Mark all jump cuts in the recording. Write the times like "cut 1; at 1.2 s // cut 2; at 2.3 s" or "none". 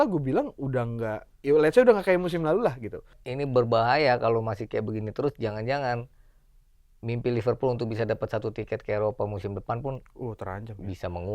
cut 1; at 3.2 s